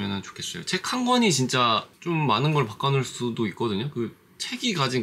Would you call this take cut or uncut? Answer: uncut